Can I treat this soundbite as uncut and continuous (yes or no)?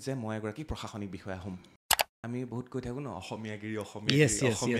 no